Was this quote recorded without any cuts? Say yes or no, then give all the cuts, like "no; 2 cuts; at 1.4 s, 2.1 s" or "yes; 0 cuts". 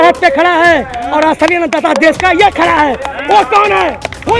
yes; 0 cuts